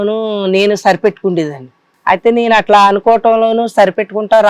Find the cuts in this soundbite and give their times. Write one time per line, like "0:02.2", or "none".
0:01.9